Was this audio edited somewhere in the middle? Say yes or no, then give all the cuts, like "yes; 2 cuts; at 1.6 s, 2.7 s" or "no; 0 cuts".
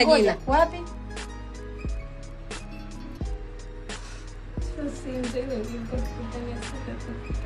yes; 2 cuts; at 0.9 s, 4.7 s